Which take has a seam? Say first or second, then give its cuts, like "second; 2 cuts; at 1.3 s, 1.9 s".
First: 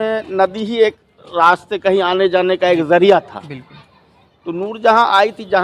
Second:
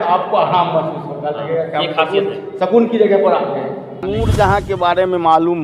second; 1 cut; at 4.0 s